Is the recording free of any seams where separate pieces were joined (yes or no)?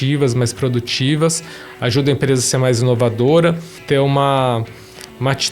no